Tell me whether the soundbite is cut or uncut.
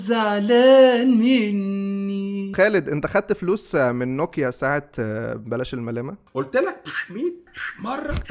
cut